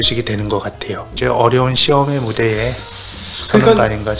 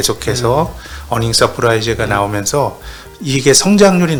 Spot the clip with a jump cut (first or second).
first